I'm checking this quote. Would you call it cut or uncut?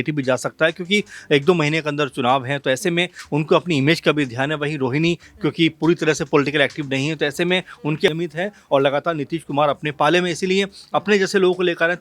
cut